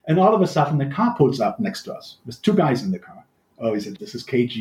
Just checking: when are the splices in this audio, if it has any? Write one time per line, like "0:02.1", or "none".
0:03.7